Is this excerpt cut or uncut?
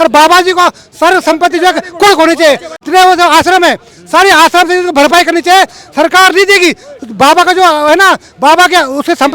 cut